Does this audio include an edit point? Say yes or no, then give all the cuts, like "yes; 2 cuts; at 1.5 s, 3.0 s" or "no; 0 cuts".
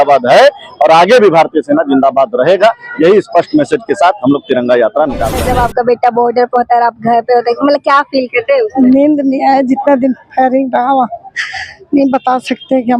yes; 1 cut; at 5.4 s